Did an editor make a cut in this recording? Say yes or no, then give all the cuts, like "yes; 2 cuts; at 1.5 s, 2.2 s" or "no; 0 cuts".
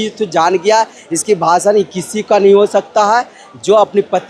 no; 0 cuts